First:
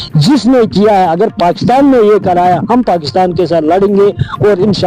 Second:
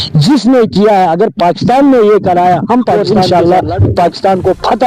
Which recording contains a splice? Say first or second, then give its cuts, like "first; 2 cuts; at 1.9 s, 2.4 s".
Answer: second; 1 cut; at 3.0 s